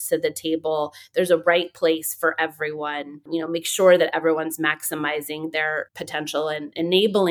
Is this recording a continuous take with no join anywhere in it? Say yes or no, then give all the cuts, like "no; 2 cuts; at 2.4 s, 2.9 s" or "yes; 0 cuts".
no; 1 cut; at 6.0 s